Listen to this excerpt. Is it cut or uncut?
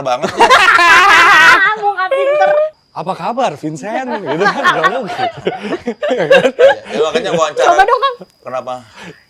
cut